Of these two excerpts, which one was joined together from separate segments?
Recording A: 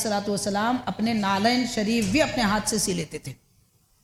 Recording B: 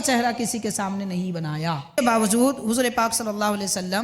B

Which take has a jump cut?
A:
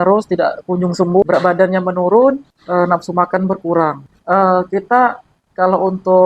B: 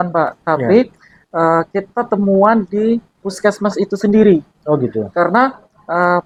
A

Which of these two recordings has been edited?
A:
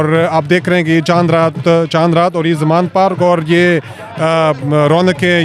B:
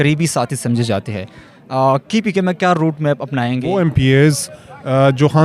B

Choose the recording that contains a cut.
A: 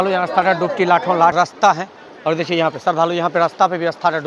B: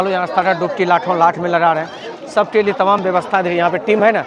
A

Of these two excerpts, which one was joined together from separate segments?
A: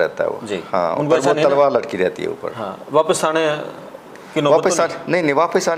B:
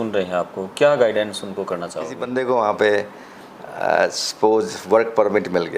B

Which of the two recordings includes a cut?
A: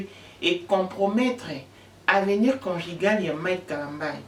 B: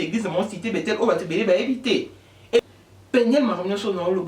B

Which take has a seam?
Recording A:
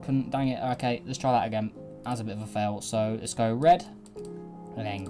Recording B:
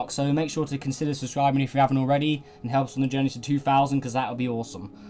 A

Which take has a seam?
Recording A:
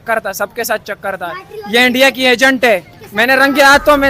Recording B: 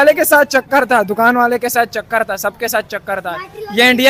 A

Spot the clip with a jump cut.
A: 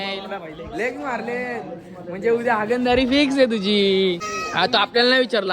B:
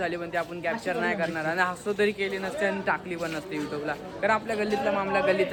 A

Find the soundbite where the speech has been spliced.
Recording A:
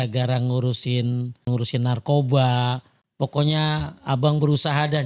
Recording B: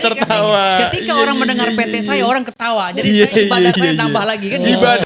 A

